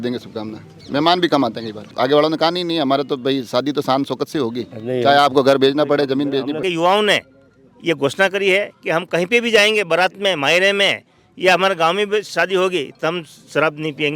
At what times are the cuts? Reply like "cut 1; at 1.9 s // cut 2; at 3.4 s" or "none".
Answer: cut 1; at 1.9 s // cut 2; at 6.6 s

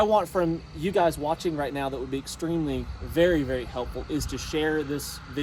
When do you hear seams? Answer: none

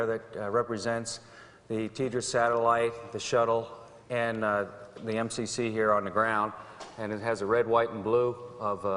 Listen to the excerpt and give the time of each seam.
cut 1; at 4.1 s

